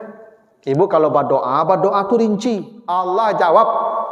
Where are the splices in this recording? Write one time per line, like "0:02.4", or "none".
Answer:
0:03.0